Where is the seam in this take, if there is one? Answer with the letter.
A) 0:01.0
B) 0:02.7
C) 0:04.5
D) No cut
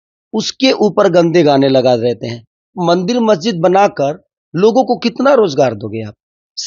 B